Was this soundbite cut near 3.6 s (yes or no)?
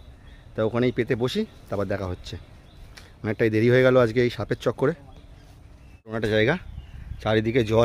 no